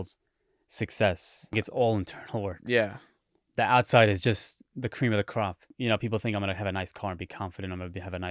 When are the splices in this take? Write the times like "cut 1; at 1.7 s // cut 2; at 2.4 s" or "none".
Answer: cut 1; at 1.5 s // cut 2; at 5.6 s